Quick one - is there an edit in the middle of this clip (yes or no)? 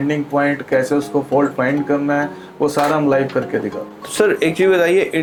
no